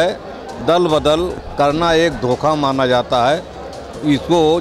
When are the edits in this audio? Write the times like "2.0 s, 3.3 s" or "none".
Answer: none